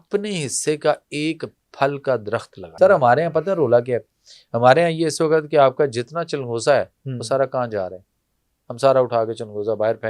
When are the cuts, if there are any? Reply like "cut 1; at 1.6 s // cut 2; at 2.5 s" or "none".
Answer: cut 1; at 2.7 s